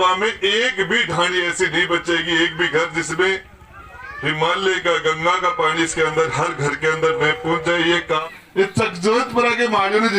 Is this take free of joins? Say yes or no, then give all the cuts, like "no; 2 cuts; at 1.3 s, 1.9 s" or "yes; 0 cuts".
no; 1 cut; at 8.2 s